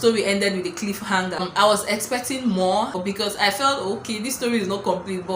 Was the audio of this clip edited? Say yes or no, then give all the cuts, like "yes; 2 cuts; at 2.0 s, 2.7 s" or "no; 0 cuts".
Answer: yes; 2 cuts; at 1.5 s, 3.0 s